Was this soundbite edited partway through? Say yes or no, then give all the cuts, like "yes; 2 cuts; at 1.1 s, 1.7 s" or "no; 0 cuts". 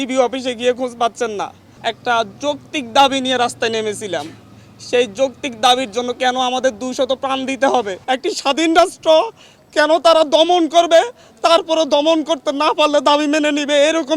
yes; 2 cuts; at 1.6 s, 7.9 s